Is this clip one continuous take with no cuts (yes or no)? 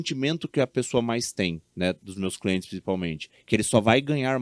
yes